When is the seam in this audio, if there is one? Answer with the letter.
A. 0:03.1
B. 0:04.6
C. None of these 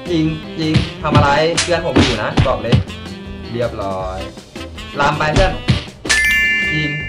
C